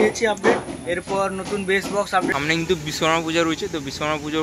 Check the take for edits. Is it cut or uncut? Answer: cut